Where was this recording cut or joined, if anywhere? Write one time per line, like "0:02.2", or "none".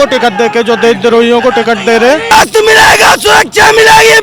0:02.3